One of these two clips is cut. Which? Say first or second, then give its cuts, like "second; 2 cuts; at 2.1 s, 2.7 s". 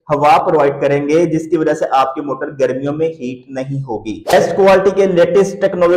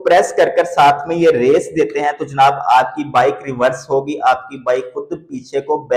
first; 1 cut; at 4.2 s